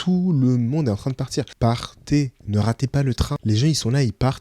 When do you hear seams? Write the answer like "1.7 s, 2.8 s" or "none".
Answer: 1.5 s, 3.4 s